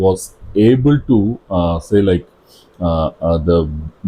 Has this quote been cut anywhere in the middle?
no; 0 cuts

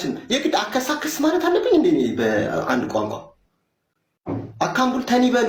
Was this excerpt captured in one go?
yes; 0 cuts

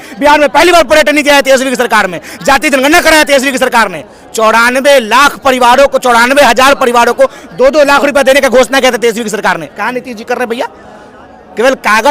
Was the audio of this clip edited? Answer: no; 0 cuts

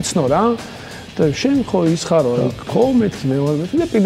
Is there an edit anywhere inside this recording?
yes; 1 cut; at 2.6 s

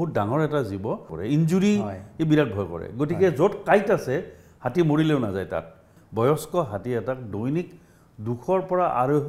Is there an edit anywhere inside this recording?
yes; 2 cuts; at 1.1 s, 6.0 s

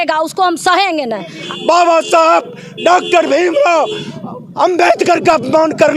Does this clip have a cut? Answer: yes; 1 cut; at 1.3 s

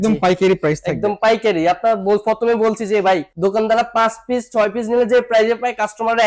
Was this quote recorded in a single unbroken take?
no; 1 cut; at 3.3 s

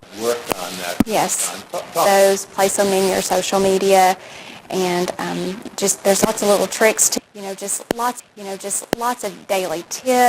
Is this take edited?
no; 0 cuts

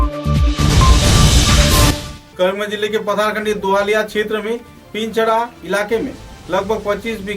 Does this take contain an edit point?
yes; 1 cut; at 2.1 s

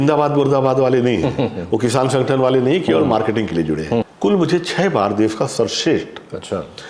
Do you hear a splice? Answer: yes; 1 cut; at 4.1 s

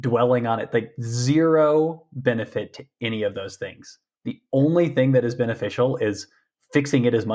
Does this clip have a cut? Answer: no; 0 cuts

